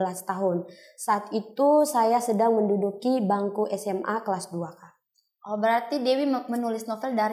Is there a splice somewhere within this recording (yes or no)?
no